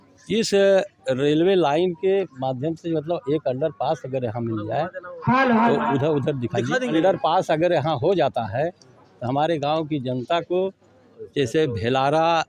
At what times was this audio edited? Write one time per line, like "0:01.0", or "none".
0:06.9